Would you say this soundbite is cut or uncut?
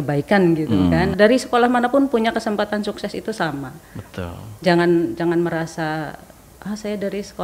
cut